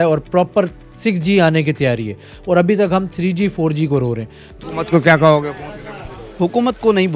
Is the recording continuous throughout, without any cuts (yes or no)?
no